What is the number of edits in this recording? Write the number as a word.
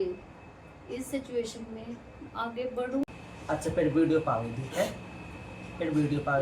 one